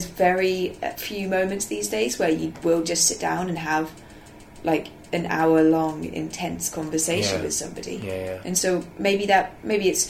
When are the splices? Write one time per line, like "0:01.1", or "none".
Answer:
0:01.0